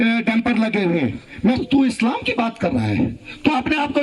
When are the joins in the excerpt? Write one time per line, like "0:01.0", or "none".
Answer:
0:01.6